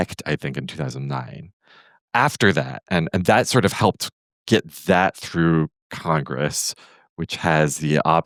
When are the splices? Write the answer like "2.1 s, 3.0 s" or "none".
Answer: none